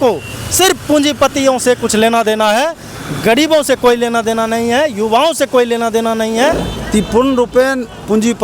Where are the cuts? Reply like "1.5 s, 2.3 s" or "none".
6.6 s